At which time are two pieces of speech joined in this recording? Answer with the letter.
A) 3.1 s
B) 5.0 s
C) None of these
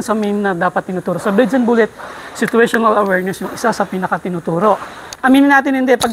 B